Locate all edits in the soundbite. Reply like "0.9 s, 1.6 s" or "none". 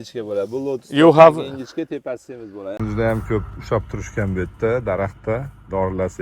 2.8 s